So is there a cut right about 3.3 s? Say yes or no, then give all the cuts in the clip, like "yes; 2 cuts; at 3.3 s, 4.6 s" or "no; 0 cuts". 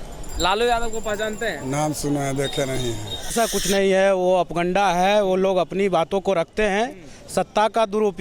yes; 1 cut; at 3.3 s